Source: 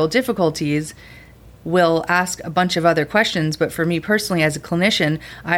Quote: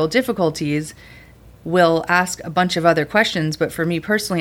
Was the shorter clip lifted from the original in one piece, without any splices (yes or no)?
yes